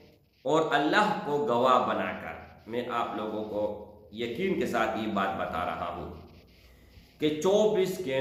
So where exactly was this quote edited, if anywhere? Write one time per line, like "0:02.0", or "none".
none